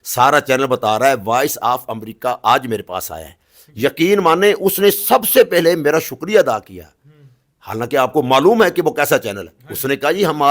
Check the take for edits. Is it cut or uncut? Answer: uncut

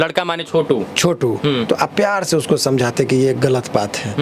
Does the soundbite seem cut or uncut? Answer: uncut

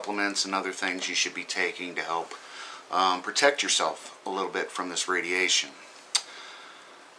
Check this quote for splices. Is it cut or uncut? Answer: uncut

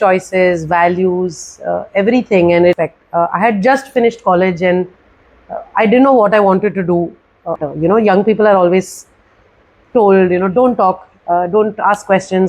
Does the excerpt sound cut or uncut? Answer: cut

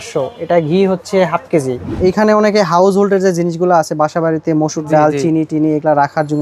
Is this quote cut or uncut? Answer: cut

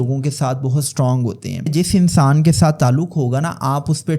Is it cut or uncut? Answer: cut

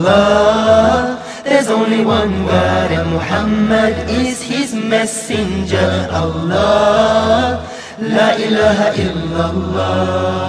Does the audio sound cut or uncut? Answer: uncut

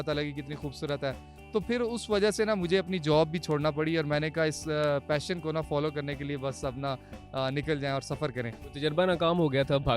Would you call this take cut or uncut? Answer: uncut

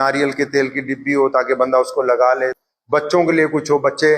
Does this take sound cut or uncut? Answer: cut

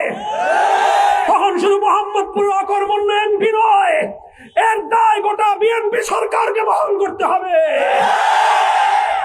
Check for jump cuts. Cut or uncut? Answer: uncut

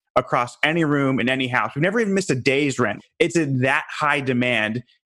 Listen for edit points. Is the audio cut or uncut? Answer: cut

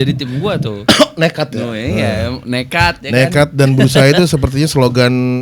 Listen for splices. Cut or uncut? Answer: uncut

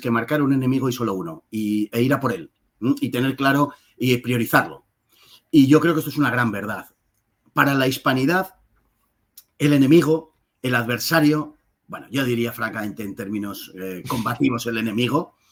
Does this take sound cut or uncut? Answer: uncut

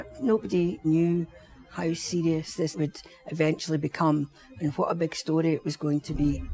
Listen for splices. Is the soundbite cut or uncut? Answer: cut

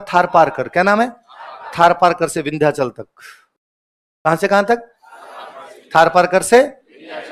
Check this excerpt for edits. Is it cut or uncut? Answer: uncut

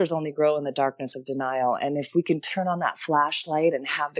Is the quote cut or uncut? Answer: uncut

